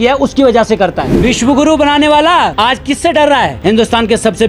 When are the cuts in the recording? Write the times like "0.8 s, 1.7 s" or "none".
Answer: 1.1 s, 2.5 s, 3.6 s